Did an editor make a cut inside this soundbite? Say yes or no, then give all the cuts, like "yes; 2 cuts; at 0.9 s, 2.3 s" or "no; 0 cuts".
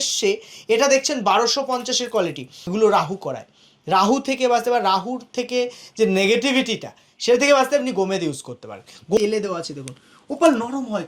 yes; 2 cuts; at 2.5 s, 9.2 s